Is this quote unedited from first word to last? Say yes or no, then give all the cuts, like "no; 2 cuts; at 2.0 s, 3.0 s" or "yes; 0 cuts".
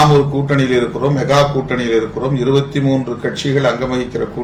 yes; 0 cuts